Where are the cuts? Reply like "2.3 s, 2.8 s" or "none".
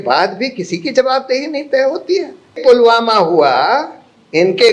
2.6 s